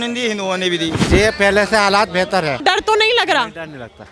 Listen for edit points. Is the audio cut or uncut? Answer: cut